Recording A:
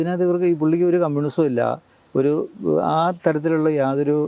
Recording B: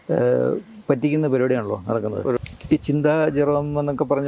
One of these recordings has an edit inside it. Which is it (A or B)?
B